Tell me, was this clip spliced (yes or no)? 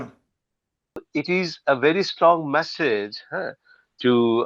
yes